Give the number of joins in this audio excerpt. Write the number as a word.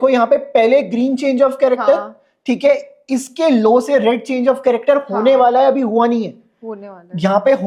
zero